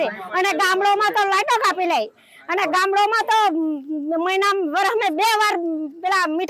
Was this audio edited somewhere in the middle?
no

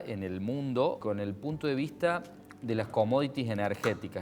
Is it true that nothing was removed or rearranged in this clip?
no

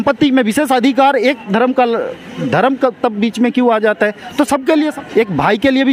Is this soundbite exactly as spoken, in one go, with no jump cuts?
no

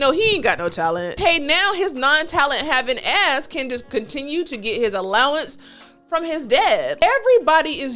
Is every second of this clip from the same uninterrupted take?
no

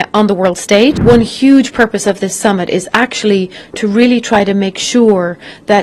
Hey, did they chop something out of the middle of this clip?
yes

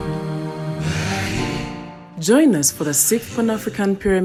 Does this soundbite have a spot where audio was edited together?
no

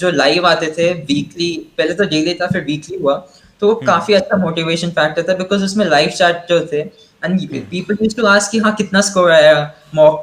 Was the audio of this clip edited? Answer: no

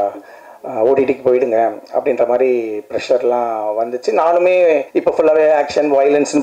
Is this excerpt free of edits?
no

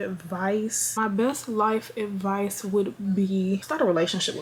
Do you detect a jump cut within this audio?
no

